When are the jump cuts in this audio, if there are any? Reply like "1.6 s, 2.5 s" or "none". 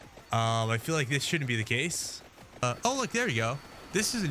2.6 s